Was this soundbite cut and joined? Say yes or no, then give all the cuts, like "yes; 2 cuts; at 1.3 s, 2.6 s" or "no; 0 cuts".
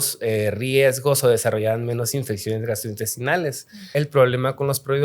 yes; 1 cut; at 3.8 s